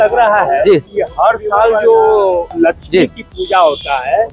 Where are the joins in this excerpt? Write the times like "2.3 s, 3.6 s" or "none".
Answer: 1.0 s, 2.5 s